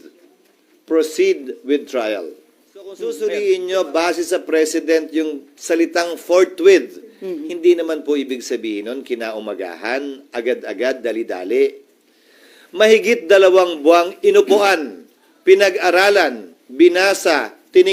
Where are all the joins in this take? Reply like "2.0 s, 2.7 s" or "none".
3.0 s